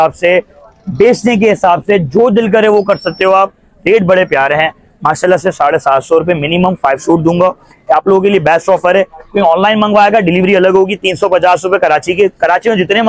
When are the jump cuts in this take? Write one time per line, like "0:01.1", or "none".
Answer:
none